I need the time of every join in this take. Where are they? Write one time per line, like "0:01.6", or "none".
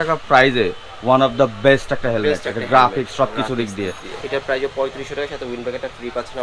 0:04.1